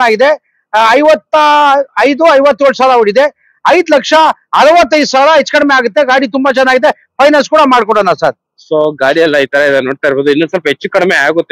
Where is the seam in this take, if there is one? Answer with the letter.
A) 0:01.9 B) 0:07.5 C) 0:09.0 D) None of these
D